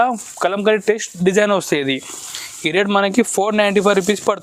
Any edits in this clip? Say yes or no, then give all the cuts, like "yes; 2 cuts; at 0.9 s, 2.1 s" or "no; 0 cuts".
no; 0 cuts